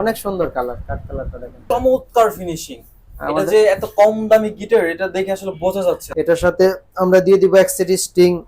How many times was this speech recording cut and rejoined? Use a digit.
2